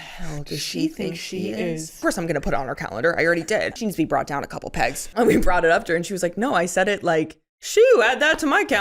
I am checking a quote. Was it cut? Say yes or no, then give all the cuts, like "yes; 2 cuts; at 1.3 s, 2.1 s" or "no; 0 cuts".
yes; 3 cuts; at 2.0 s, 3.8 s, 5.1 s